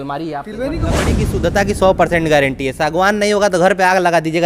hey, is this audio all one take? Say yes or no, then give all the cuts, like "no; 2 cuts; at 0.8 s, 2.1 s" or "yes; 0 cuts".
no; 1 cut; at 1.1 s